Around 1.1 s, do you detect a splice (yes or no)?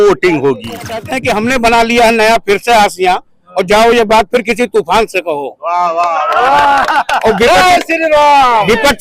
yes